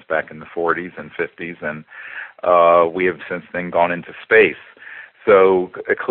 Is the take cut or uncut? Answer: cut